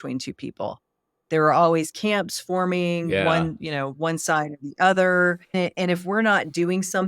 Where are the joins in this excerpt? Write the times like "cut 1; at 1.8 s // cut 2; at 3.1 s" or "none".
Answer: cut 1; at 5.5 s